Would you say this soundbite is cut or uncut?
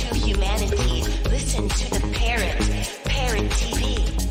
uncut